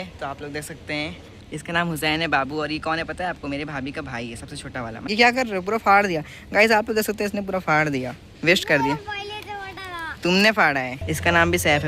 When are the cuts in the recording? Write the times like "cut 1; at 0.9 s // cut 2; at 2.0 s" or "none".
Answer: cut 1; at 1.4 s // cut 2; at 5.0 s // cut 3; at 11.0 s